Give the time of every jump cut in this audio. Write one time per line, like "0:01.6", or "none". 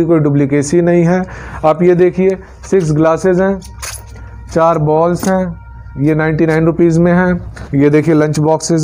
0:07.5